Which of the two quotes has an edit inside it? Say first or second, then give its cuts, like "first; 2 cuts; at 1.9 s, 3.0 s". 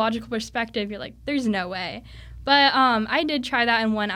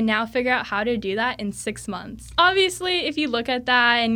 second; 1 cut; at 2.3 s